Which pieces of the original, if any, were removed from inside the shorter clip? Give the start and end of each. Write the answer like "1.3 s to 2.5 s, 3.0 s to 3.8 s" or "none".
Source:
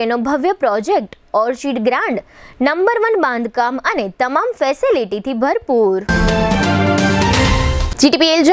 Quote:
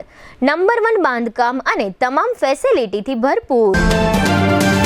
5.9 s to 6.1 s